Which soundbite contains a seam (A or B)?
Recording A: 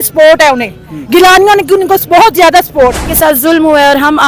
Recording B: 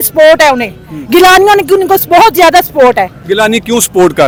A